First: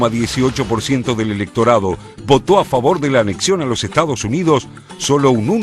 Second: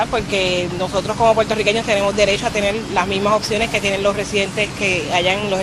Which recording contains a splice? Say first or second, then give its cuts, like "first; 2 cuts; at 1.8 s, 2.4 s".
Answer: first; 1 cut; at 1.2 s